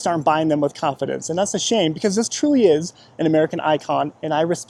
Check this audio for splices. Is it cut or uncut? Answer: uncut